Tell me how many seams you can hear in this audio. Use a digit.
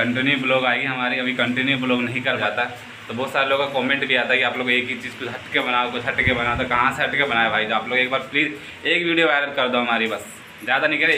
1